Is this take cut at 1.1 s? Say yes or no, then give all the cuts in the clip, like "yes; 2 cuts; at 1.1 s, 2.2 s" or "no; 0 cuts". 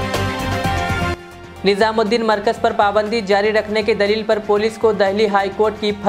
yes; 1 cut; at 1.1 s